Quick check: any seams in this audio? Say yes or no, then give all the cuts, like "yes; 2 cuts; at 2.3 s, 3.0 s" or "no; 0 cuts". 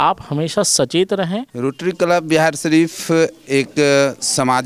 yes; 1 cut; at 1.5 s